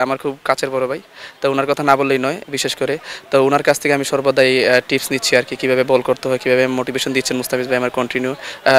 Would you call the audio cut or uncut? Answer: uncut